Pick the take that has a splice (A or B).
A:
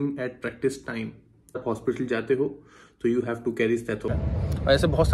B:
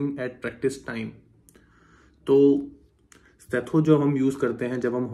A